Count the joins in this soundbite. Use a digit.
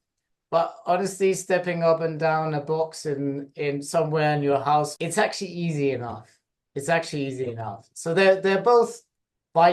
1